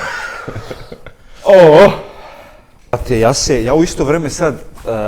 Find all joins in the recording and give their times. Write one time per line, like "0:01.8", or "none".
0:03.0